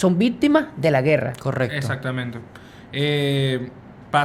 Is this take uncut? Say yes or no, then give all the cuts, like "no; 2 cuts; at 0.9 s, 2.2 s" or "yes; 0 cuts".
yes; 0 cuts